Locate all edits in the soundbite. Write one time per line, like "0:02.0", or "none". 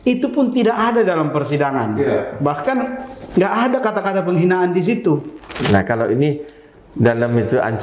0:05.6